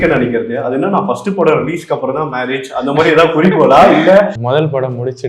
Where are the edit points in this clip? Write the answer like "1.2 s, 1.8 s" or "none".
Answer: 4.4 s